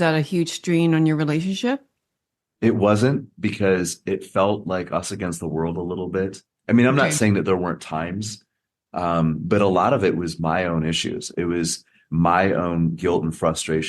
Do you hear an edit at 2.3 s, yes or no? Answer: no